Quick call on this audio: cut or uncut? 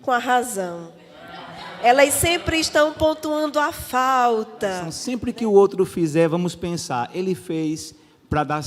cut